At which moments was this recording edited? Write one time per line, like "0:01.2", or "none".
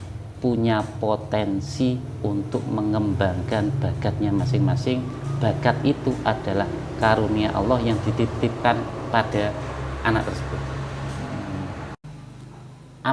0:12.1